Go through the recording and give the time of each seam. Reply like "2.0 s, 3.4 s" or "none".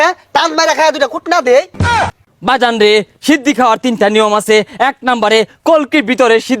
2.0 s